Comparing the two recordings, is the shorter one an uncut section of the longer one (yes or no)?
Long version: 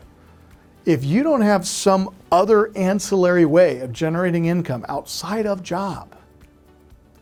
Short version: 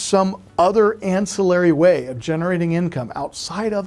yes